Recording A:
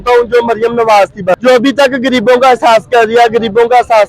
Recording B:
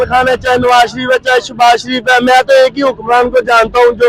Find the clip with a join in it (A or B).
A